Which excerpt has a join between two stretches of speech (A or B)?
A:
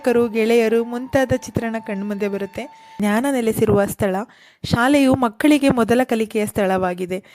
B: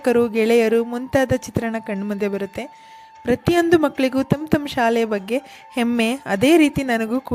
A